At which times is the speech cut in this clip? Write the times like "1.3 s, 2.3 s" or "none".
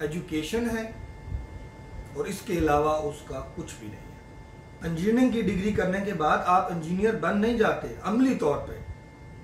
4.7 s